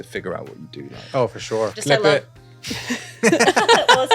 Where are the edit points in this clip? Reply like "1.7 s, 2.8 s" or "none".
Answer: 1.7 s